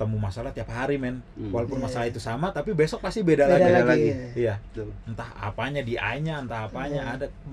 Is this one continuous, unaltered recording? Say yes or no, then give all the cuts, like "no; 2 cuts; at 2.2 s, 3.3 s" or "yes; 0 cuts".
yes; 0 cuts